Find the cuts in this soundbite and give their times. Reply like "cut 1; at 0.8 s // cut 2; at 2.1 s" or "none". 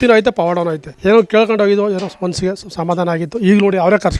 cut 1; at 0.9 s